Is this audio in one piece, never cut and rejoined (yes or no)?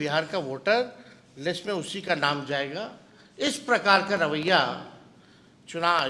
yes